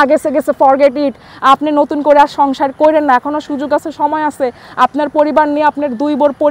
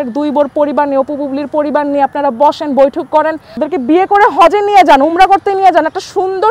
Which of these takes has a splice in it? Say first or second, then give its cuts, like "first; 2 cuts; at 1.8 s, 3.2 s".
second; 1 cut; at 3.5 s